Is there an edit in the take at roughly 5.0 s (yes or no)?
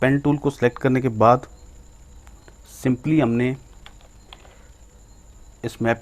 yes